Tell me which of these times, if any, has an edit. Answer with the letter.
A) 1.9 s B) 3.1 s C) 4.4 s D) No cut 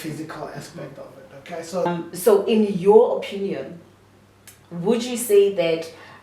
A